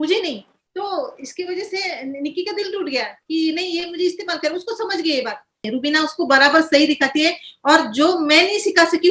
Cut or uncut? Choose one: cut